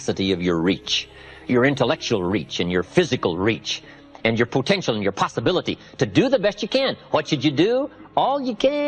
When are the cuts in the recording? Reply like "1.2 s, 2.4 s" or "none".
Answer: none